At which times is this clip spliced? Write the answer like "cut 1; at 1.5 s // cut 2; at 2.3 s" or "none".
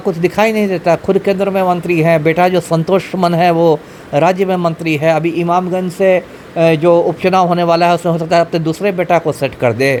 none